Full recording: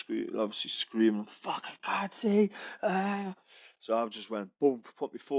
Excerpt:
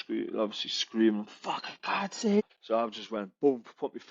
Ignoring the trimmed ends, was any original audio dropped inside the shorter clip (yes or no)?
yes